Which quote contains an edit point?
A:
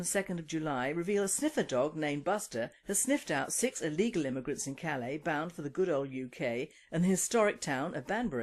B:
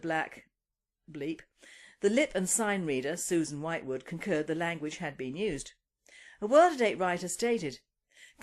A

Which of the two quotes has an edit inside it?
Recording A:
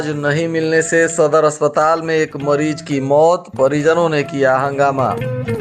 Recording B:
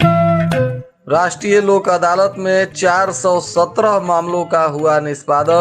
B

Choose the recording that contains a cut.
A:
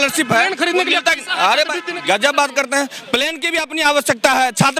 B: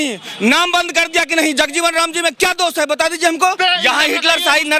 B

